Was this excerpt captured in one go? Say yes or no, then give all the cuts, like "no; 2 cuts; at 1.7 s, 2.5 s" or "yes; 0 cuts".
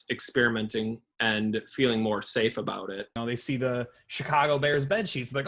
no; 1 cut; at 3.2 s